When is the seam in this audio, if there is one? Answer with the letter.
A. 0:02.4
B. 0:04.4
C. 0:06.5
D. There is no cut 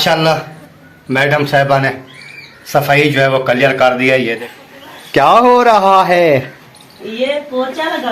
B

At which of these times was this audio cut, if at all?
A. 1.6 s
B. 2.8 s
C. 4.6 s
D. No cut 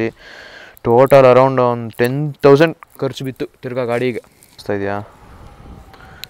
C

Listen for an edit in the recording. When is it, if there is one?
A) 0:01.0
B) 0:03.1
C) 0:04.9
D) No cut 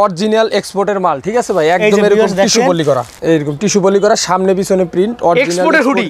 B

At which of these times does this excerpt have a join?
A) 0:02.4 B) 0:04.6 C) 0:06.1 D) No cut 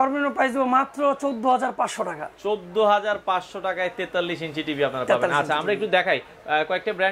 D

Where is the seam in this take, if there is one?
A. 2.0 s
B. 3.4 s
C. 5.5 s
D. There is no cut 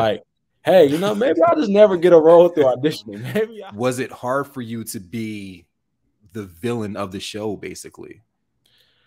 B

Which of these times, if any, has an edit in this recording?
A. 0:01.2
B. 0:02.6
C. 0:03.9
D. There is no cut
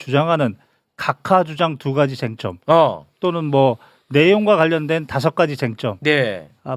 D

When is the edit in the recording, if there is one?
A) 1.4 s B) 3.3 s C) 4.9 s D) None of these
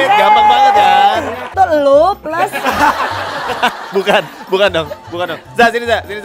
A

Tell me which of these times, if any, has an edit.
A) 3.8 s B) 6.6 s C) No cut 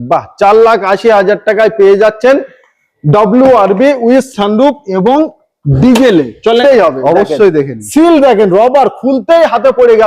B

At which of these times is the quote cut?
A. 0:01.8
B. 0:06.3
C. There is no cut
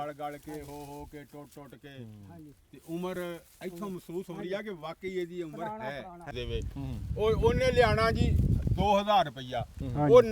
B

